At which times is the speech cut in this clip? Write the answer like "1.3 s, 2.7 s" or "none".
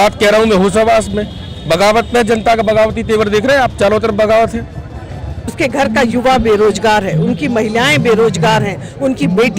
5.5 s